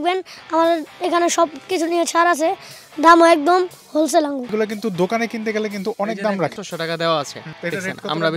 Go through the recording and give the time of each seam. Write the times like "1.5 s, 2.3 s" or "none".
4.5 s, 6.5 s, 7.4 s